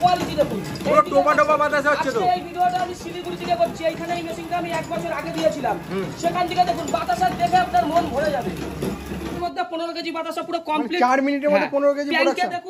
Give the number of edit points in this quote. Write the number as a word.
one